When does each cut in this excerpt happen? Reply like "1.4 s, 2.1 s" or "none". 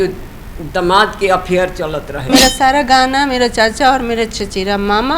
2.3 s